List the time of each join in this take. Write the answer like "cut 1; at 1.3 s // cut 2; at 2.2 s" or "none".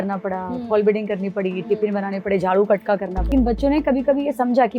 cut 1; at 3.3 s

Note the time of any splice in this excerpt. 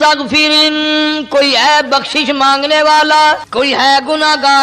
cut 1; at 3.4 s

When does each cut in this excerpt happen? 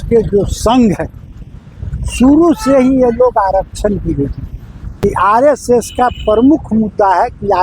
cut 1; at 4.8 s

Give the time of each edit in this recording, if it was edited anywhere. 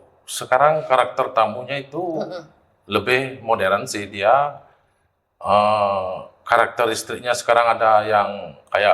none

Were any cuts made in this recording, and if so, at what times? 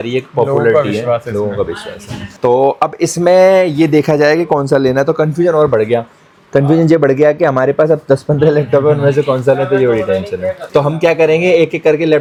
none

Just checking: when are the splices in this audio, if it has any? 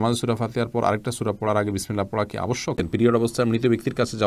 cut 1; at 2.8 s

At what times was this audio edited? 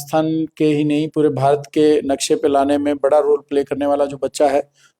none

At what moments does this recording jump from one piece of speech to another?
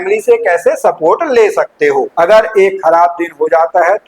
cut 1; at 2.1 s

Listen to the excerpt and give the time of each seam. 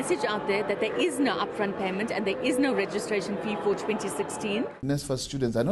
cut 1; at 4.8 s

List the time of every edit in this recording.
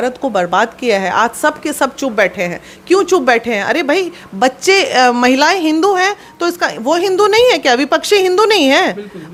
none

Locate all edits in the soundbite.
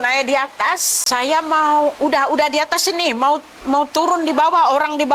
cut 1; at 0.9 s

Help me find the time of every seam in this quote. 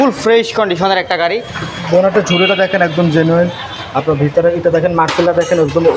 cut 1; at 1.7 s

